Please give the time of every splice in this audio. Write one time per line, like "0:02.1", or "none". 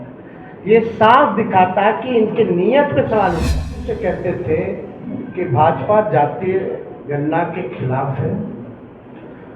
0:03.9